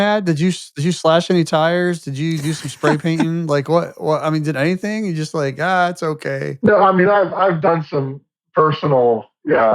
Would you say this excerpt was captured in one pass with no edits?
no; 1 cut; at 6.5 s

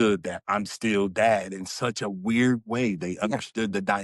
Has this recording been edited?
no; 0 cuts

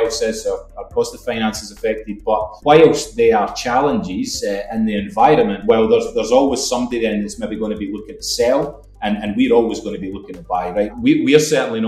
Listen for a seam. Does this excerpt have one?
yes; 1 cut; at 10.9 s

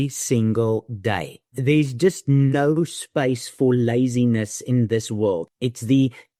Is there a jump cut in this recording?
no; 0 cuts

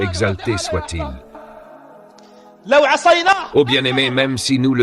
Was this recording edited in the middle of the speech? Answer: no; 0 cuts

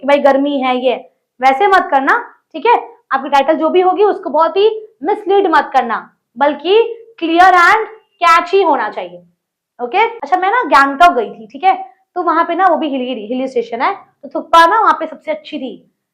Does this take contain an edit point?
yes; 1 cut; at 10.2 s

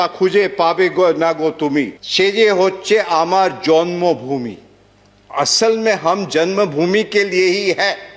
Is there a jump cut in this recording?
yes; 1 cut; at 2.0 s

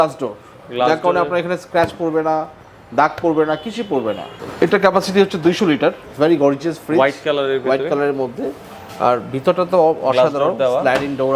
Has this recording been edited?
yes; 2 cuts; at 4.3 s, 6.0 s

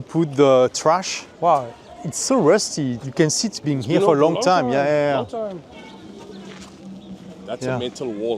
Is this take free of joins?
no; 1 cut; at 1.2 s

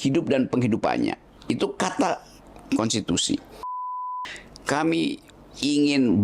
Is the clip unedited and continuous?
no; 1 cut; at 4.0 s

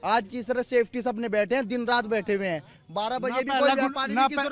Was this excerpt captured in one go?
yes; 0 cuts

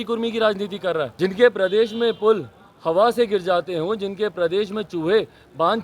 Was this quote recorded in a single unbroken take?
no; 1 cut; at 1.1 s

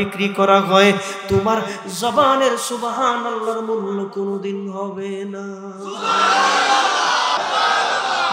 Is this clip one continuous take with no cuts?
no; 1 cut; at 7.4 s

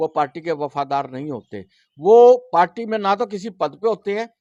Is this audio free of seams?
yes; 0 cuts

